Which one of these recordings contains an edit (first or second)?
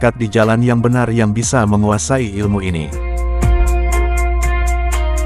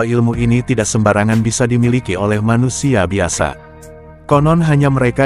first